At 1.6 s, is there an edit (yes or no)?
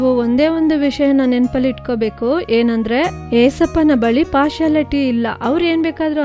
no